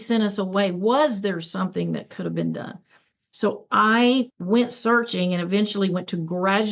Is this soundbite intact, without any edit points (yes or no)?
no